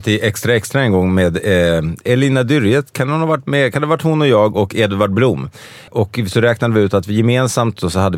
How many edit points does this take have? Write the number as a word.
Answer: two